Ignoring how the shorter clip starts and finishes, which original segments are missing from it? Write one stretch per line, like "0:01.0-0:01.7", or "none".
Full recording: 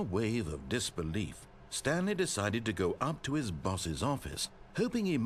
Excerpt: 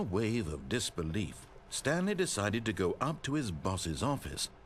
none